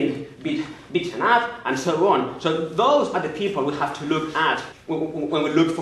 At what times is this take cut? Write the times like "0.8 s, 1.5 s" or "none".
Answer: 4.7 s

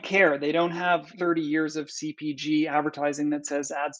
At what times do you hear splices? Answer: 1.1 s

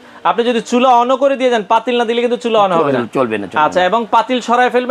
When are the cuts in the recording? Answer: none

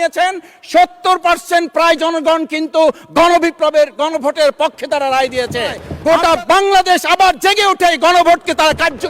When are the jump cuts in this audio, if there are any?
5.9 s

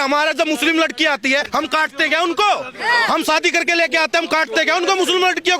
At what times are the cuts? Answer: 1.5 s

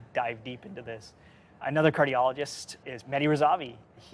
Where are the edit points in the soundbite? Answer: none

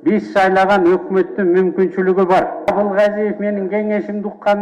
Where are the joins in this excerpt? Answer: 2.7 s

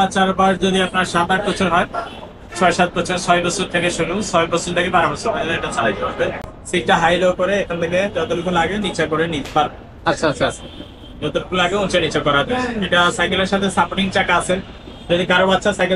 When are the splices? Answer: none

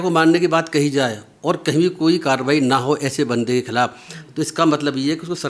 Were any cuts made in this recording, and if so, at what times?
none

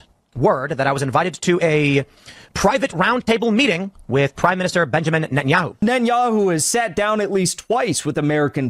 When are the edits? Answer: 5.8 s

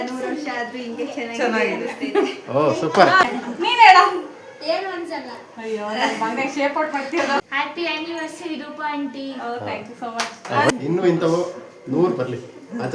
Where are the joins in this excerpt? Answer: 3.4 s, 7.4 s, 10.7 s

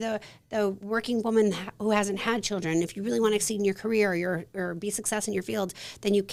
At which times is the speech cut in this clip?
none

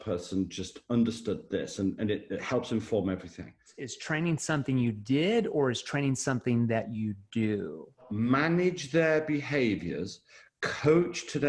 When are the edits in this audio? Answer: 3.7 s, 8.1 s

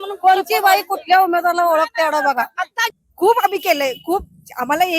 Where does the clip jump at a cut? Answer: 2.8 s

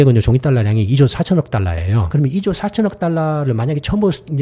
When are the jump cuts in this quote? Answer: 2.0 s

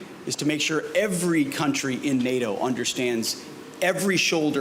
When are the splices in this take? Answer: none

